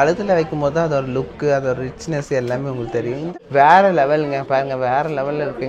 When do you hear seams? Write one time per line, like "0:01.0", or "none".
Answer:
0:03.3